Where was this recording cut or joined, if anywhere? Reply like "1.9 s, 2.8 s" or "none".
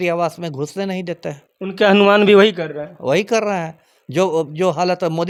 none